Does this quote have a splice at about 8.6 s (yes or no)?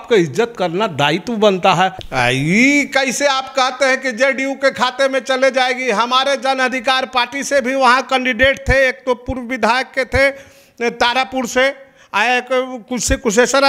no